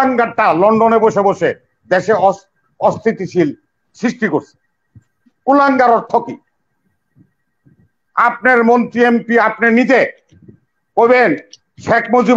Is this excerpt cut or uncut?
uncut